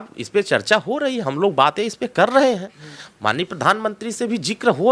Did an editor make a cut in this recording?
no; 0 cuts

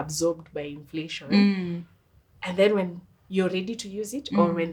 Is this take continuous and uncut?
yes; 0 cuts

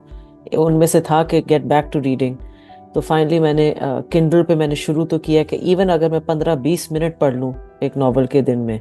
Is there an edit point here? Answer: no; 0 cuts

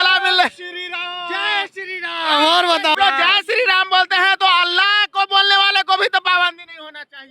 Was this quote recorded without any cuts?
no; 1 cut; at 3.0 s

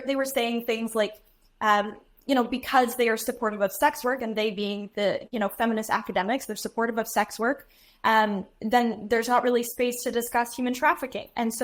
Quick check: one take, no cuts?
yes; 0 cuts

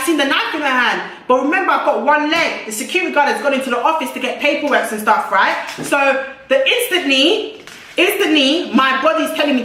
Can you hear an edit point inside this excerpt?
no; 0 cuts

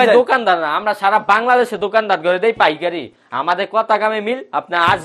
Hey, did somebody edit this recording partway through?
no; 0 cuts

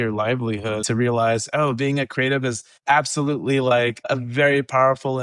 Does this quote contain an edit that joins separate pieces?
yes; 3 cuts; at 0.9 s, 2.7 s, 4.1 s

